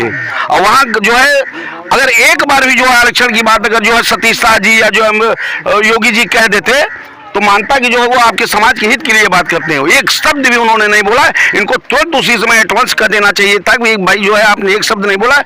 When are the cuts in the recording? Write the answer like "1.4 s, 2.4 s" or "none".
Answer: none